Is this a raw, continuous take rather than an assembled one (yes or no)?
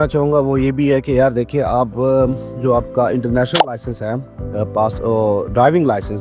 yes